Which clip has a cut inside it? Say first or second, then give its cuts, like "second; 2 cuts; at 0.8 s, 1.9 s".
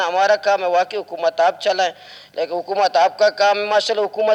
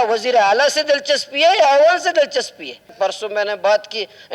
second; 1 cut; at 2.9 s